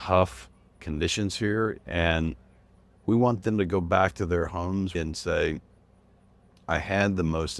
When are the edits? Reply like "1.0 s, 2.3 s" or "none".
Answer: 1.8 s, 5.0 s